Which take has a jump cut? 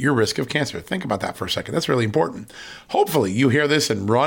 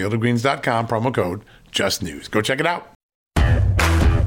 second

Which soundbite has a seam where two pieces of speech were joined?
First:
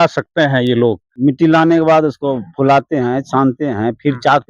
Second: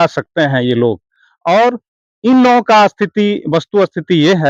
first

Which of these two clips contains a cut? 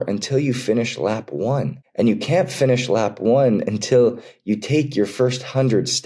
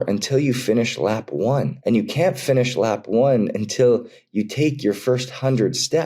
second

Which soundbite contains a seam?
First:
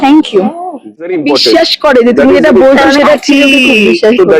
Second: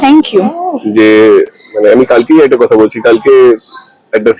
first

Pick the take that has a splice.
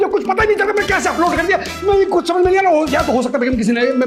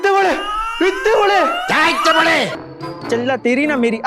second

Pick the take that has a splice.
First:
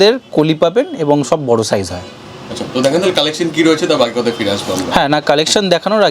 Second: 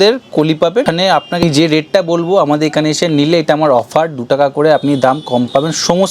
second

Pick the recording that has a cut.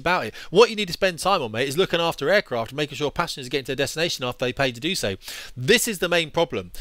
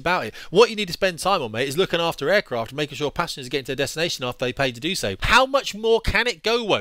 second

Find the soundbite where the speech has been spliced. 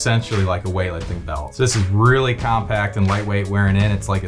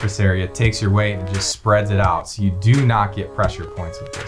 first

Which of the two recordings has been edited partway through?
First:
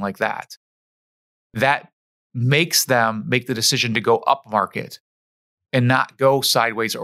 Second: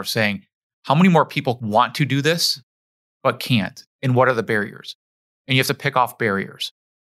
second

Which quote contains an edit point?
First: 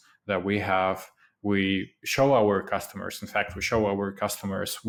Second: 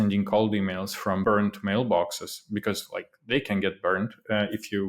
second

